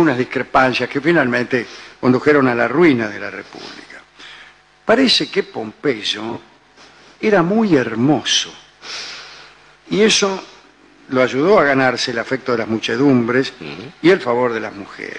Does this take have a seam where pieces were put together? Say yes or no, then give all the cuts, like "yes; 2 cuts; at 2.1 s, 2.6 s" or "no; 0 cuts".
no; 0 cuts